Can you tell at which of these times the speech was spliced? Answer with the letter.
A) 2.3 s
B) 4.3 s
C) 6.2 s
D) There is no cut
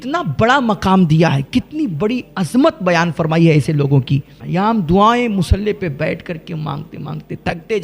B